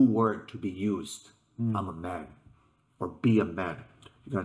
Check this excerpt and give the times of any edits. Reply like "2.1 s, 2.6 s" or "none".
none